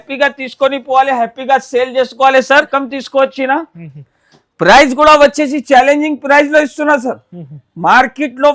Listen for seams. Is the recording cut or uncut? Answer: cut